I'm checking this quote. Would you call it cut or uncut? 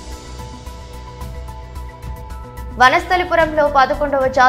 cut